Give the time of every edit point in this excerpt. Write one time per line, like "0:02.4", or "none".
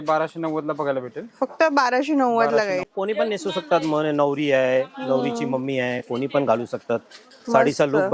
0:02.9